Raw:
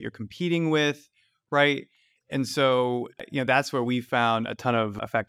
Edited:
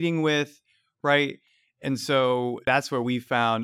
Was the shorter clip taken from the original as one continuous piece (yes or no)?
no